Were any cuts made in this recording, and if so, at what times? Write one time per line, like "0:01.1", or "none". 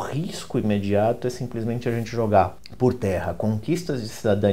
0:02.6